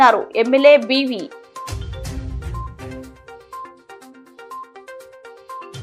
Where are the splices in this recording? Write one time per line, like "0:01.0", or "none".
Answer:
none